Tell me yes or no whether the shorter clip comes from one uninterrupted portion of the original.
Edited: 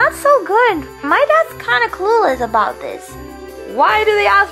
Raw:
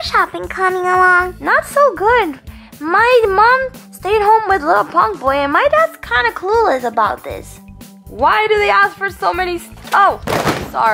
no